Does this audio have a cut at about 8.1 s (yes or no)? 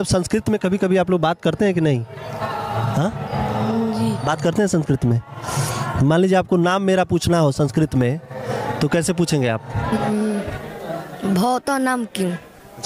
no